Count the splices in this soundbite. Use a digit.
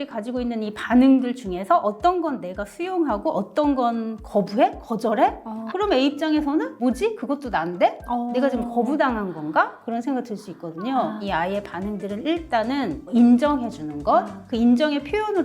2